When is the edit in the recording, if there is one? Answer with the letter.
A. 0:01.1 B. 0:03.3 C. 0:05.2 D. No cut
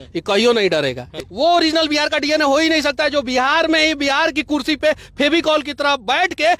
A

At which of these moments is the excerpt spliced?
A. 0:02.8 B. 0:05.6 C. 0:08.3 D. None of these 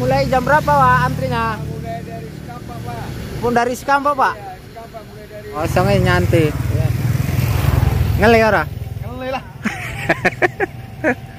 B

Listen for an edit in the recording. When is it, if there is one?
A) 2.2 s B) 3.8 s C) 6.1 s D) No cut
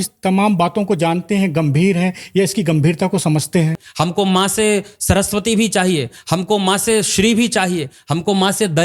B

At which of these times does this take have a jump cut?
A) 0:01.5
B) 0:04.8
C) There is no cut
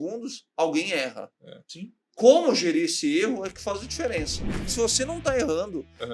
B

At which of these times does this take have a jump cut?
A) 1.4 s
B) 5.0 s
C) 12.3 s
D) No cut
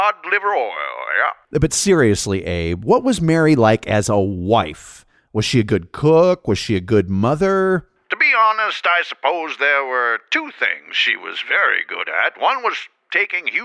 A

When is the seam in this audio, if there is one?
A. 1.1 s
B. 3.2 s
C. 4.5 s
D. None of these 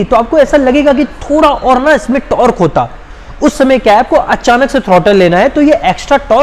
D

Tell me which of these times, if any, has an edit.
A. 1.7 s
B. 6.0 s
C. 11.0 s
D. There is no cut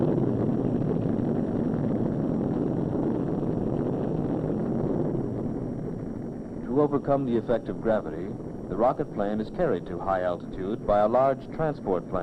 C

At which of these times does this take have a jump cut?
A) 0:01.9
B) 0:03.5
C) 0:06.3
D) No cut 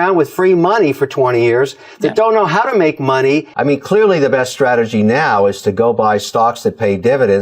B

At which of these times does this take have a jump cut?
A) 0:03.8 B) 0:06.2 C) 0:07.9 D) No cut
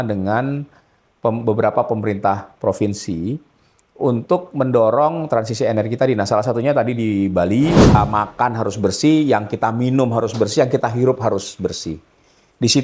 C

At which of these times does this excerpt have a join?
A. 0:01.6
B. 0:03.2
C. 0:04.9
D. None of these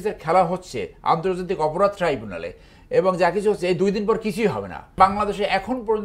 C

